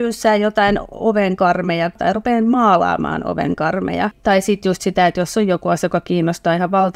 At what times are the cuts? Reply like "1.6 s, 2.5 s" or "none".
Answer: 2.0 s, 4.2 s